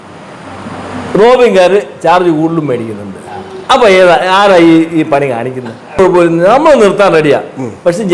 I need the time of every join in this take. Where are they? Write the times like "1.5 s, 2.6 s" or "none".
6.0 s